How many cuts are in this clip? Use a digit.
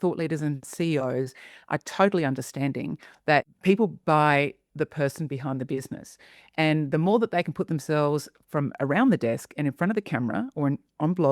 1